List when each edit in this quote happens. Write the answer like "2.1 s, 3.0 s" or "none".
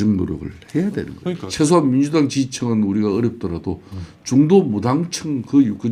1.4 s